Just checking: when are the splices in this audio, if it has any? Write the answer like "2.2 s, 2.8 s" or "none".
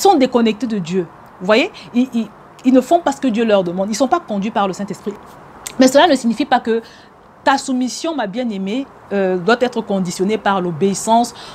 5.1 s